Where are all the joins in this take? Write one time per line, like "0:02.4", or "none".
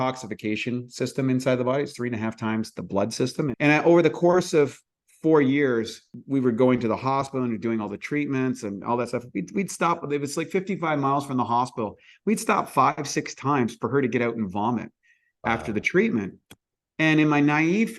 0:03.5
0:06.1